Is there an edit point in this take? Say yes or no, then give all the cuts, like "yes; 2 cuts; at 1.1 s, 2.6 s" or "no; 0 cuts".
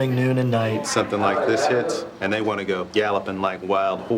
yes; 2 cuts; at 0.9 s, 2.4 s